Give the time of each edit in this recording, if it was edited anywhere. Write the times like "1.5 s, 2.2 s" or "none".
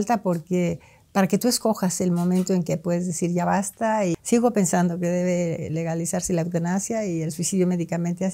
4.1 s